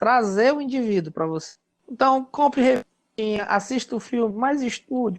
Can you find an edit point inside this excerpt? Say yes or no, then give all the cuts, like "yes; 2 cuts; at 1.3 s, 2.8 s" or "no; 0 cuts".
yes; 1 cut; at 1.7 s